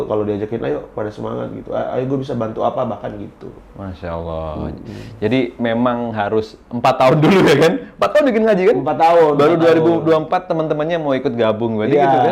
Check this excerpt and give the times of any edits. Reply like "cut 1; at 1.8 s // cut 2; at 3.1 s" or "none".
none